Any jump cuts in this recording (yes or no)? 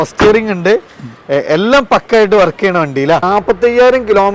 yes